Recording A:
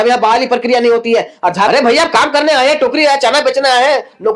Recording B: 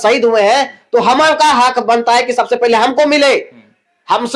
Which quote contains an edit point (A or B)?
A